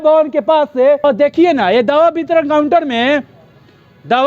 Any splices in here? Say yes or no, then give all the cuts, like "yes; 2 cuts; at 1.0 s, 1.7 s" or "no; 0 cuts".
yes; 1 cut; at 1.0 s